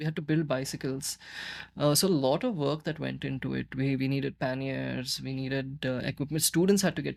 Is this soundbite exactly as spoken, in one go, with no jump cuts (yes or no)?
yes